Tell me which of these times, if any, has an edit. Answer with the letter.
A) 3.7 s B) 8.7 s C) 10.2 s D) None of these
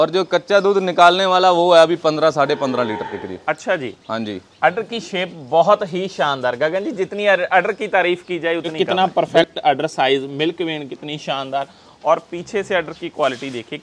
B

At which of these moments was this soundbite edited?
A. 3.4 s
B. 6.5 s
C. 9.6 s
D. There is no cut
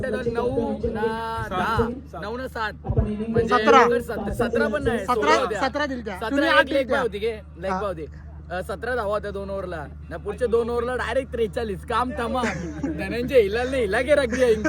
D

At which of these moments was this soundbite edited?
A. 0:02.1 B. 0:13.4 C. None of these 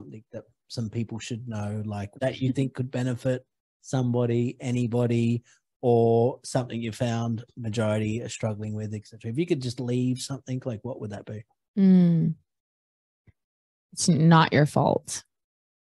A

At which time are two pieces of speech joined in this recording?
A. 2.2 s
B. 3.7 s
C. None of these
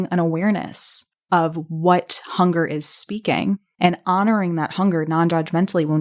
B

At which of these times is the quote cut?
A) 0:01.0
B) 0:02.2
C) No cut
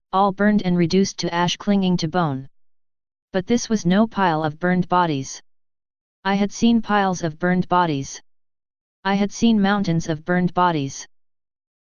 A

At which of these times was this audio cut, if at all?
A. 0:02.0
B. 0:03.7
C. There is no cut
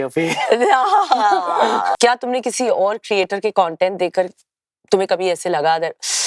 A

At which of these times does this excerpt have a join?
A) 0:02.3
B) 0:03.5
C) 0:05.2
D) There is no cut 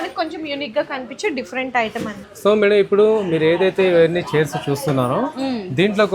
A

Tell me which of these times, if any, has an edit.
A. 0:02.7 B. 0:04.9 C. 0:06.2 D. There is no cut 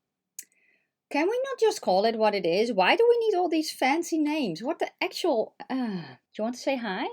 C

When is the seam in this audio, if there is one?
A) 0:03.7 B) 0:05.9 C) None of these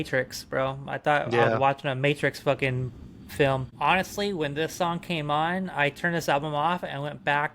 A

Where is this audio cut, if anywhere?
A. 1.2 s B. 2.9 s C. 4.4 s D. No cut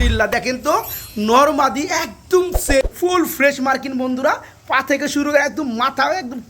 B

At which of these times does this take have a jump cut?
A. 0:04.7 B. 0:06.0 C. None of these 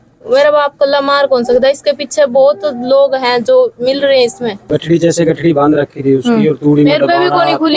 A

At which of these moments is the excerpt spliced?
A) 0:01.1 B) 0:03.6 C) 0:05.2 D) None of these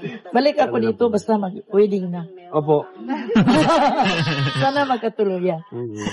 B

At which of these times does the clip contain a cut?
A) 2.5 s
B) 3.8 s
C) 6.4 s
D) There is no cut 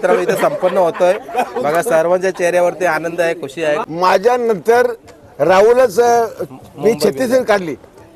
B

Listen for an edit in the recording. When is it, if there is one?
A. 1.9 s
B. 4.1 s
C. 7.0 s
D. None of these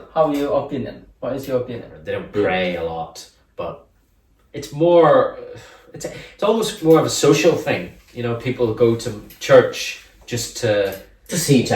A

